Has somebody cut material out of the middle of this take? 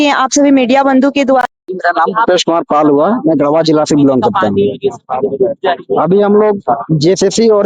yes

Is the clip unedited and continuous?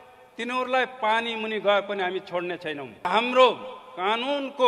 no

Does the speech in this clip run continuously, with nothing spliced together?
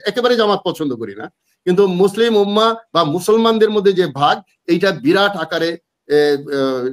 yes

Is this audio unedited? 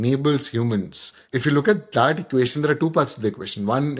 yes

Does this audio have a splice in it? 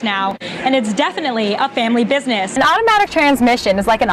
yes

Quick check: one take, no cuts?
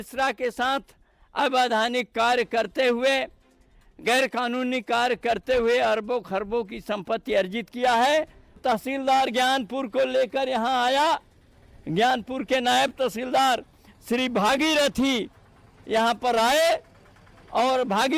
no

